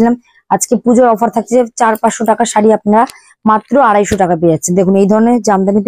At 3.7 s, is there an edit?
no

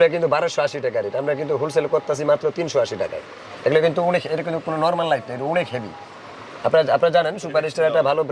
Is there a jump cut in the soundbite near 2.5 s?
no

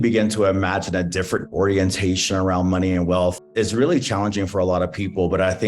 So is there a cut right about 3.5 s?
yes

